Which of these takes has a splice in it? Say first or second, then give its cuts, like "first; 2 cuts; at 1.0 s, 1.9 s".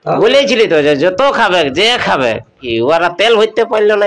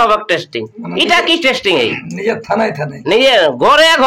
first; 1 cut; at 2.6 s